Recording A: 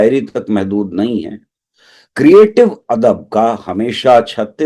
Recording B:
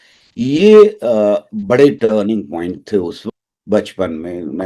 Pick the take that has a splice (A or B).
B